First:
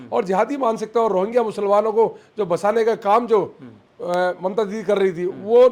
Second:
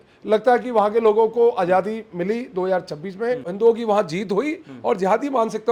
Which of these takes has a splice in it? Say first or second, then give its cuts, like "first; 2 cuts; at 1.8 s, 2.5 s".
second; 1 cut; at 3.5 s